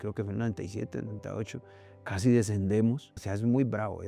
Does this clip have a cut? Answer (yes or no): yes